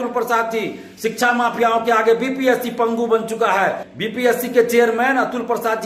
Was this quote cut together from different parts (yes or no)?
yes